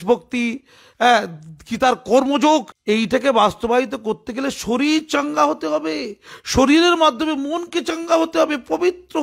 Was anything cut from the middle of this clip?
yes; 1 cut; at 2.7 s

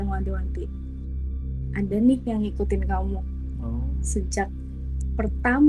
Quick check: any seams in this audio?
no; 0 cuts

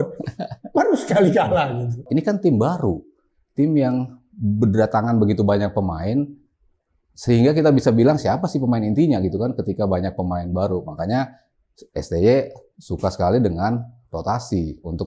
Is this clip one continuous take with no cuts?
no; 1 cut; at 2.0 s

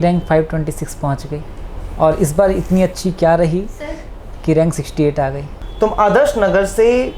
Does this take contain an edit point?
yes; 1 cut; at 5.5 s

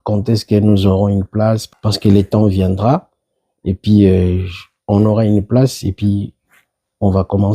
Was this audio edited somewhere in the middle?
yes; 1 cut; at 1.7 s

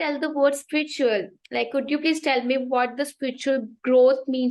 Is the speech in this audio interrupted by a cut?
no; 0 cuts

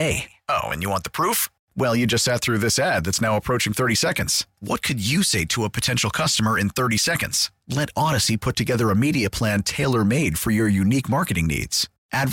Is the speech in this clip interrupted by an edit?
no; 0 cuts

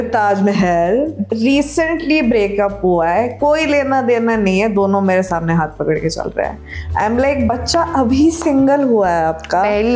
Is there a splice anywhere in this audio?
no; 0 cuts

